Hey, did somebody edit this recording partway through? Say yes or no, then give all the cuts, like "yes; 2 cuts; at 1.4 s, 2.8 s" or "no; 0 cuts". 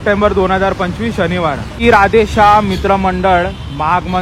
yes; 1 cut; at 1.8 s